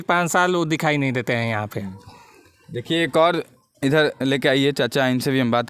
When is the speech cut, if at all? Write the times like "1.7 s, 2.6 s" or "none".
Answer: none

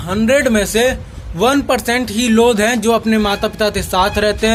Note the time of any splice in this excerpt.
none

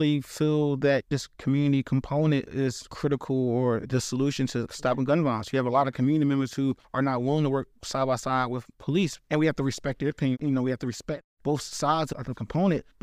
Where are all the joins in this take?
1.1 s, 2.7 s, 4.2 s, 10.4 s

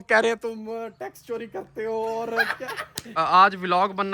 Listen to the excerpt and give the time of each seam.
3.2 s

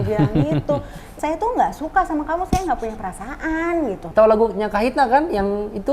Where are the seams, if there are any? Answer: 1.0 s, 4.0 s

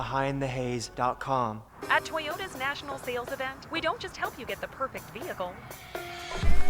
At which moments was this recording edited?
1.7 s

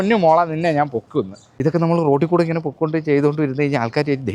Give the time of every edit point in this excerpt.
1.4 s

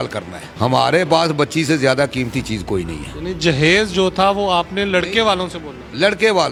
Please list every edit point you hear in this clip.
none

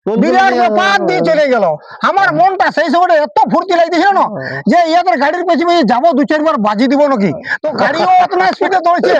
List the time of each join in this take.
none

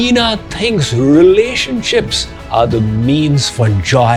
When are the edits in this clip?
none

